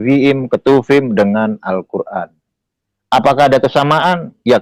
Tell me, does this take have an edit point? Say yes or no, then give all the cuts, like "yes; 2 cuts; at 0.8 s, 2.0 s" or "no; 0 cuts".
no; 0 cuts